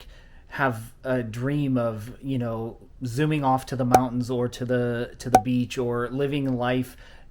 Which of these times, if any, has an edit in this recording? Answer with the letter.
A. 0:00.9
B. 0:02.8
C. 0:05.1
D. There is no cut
D